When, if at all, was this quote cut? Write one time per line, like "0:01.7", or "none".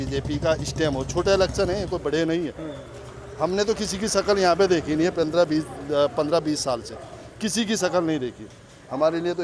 none